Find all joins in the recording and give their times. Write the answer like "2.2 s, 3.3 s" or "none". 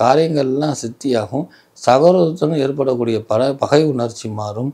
none

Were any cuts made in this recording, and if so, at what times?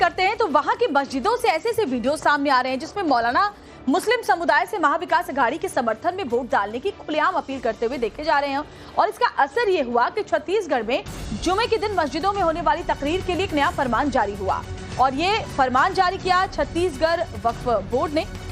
9.3 s

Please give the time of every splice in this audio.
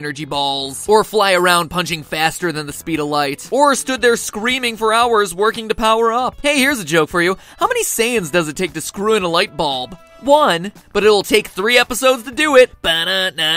11.0 s

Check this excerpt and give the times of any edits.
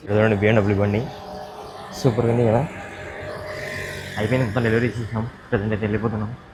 none

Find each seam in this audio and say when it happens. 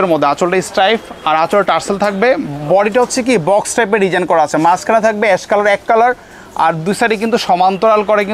none

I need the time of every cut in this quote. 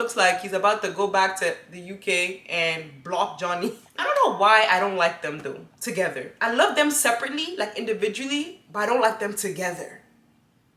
3.9 s

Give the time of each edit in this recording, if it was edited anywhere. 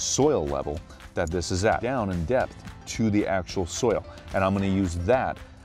1.8 s

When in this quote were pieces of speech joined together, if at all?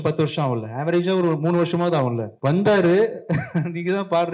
2.3 s

